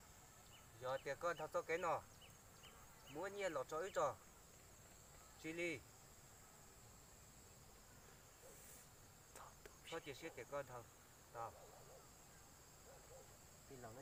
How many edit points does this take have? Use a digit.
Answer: 0